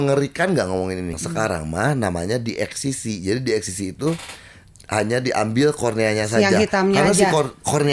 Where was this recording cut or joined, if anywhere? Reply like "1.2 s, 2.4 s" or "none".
1.2 s